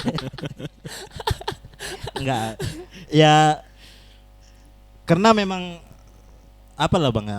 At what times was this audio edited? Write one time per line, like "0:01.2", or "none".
none